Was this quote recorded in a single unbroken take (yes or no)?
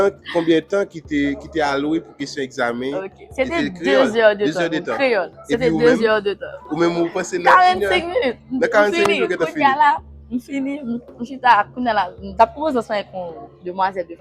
yes